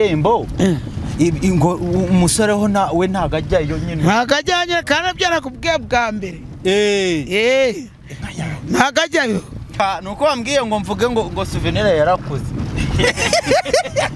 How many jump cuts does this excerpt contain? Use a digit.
1